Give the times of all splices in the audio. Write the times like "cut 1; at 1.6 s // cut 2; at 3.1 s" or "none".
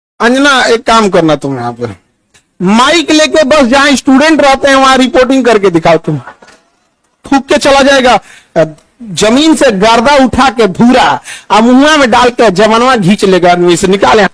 cut 1; at 7.2 s